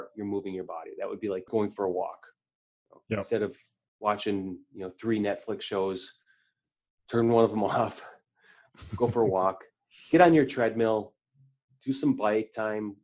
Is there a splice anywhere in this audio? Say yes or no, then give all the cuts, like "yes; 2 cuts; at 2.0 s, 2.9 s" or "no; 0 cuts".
yes; 1 cut; at 1.5 s